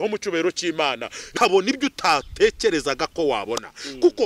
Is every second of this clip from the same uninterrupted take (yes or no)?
no